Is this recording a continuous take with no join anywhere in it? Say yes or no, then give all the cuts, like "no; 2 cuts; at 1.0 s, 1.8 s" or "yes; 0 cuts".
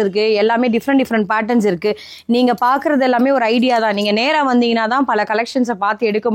yes; 0 cuts